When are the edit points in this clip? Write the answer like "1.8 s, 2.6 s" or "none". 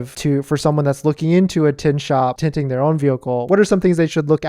2.3 s, 3.4 s